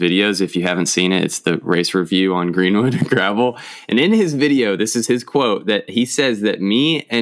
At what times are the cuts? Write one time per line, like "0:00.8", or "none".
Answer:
none